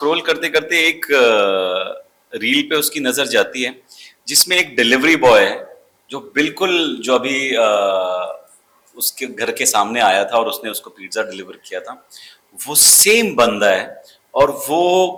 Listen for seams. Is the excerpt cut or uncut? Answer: uncut